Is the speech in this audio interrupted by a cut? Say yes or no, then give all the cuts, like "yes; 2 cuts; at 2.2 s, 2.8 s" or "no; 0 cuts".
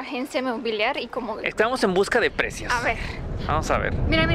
no; 0 cuts